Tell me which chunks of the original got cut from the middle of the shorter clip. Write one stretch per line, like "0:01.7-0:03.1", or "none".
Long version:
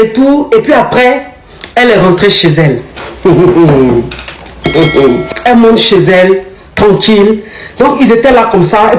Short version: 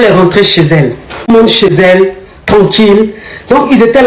0:03.2-0:05.6

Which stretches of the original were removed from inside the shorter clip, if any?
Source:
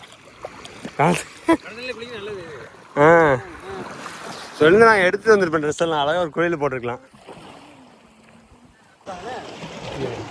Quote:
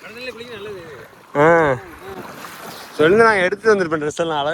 none

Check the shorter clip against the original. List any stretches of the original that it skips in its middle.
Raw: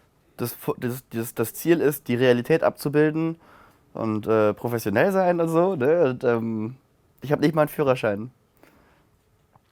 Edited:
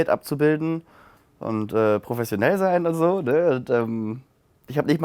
none

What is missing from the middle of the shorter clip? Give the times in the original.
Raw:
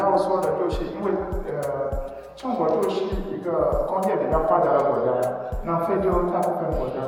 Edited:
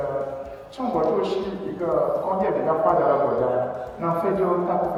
none

